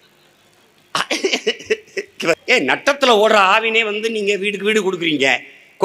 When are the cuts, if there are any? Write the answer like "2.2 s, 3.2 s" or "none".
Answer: 2.4 s

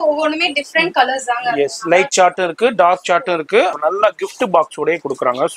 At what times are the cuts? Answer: 3.7 s

